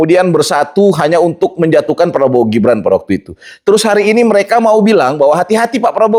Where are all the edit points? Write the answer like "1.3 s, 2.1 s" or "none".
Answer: none